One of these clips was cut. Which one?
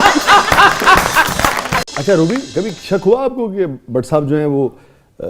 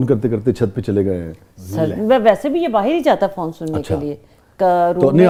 first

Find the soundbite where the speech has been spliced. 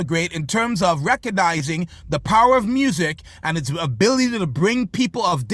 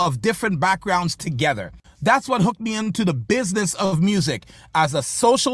second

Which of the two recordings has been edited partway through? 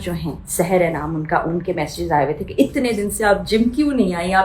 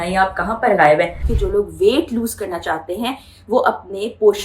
second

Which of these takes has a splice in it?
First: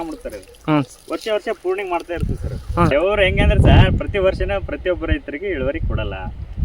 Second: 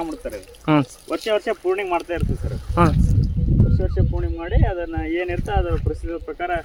first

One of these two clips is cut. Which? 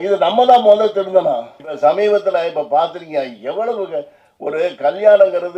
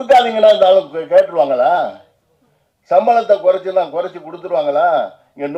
first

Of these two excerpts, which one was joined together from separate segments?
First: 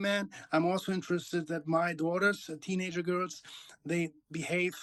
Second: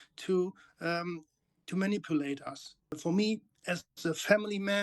second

